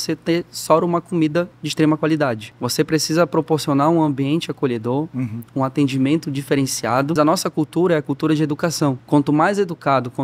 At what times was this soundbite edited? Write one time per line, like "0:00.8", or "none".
0:01.6
0:02.5
0:07.1
0:09.0